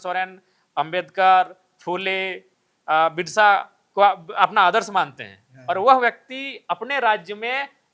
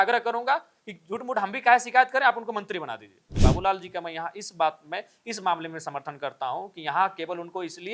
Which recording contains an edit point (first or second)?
second